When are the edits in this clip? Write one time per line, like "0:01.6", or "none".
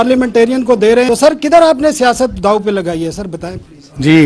0:01.1